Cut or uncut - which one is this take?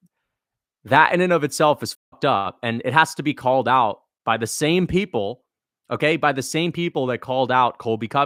uncut